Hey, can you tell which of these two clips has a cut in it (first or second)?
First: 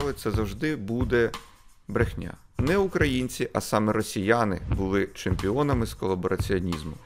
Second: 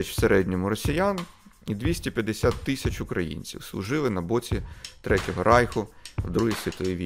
first